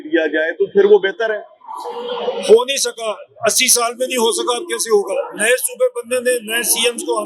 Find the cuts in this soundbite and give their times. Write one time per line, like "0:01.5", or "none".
none